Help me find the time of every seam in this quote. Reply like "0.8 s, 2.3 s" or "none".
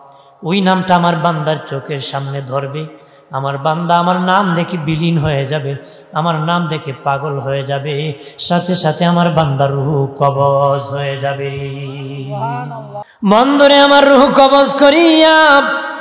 13.0 s